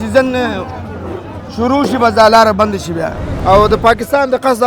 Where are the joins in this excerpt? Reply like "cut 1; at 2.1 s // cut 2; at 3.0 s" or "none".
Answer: cut 1; at 3.3 s